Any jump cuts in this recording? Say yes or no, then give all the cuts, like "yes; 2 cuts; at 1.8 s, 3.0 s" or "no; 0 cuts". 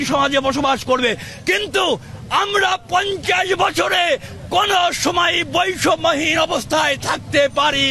no; 0 cuts